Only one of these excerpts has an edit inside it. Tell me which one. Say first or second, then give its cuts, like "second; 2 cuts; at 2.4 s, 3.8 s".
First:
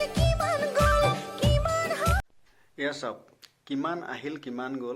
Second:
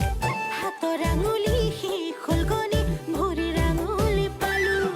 first; 2 cuts; at 1.3 s, 2.2 s